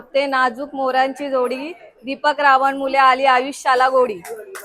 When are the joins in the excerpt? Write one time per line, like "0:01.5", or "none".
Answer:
none